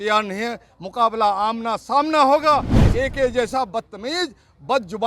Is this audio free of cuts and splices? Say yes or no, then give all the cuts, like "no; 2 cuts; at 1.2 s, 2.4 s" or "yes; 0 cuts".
no; 1 cut; at 2.8 s